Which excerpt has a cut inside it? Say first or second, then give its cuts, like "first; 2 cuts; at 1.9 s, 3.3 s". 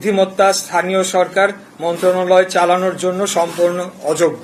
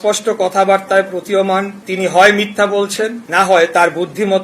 second; 2 cuts; at 1.8 s, 3.2 s